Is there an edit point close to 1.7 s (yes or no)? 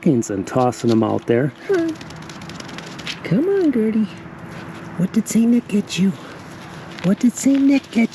yes